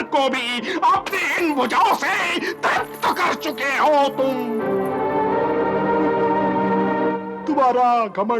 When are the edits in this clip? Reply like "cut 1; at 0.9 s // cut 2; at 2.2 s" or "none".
none